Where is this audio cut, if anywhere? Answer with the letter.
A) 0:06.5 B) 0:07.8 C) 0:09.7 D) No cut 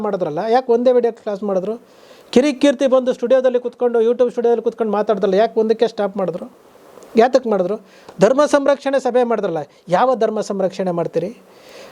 D